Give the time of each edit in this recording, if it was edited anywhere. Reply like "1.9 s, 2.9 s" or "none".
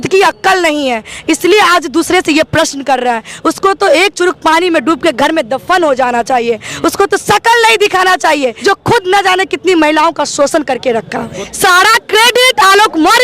8.6 s, 11.4 s